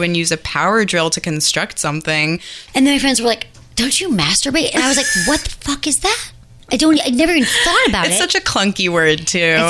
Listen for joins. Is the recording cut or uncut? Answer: cut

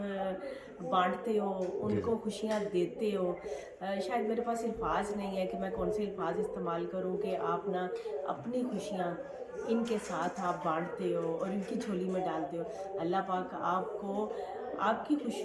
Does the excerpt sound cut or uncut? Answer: uncut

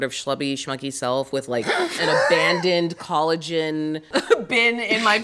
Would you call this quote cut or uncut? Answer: cut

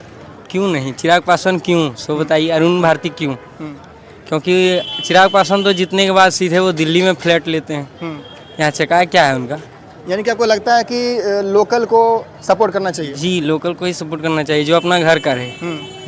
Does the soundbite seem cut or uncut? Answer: uncut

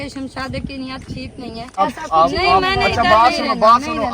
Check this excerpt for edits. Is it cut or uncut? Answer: cut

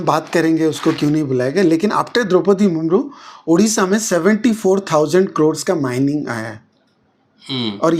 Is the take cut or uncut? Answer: uncut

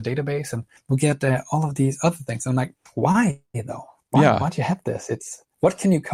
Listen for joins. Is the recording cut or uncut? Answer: uncut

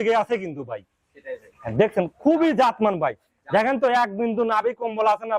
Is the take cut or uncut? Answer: uncut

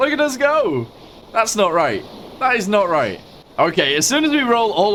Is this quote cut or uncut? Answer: uncut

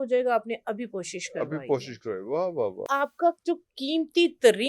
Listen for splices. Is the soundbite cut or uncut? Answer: cut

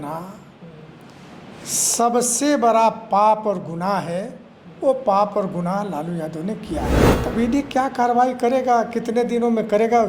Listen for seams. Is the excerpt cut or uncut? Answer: cut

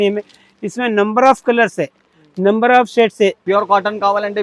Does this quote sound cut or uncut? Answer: cut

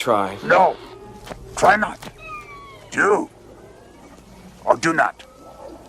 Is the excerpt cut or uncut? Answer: uncut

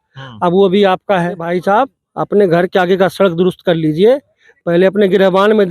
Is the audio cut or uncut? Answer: cut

